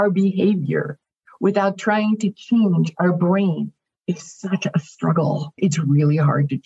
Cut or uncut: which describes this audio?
cut